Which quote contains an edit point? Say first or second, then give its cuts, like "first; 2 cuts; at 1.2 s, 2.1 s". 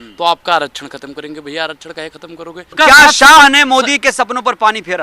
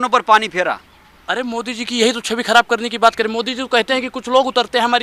first; 1 cut; at 2.7 s